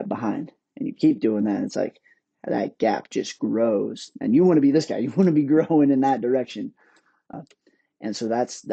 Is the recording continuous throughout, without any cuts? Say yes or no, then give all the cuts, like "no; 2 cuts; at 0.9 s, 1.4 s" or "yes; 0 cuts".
no; 1 cut; at 7.3 s